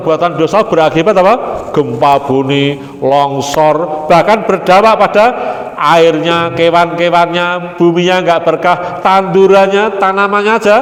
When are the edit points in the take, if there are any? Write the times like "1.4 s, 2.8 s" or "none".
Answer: none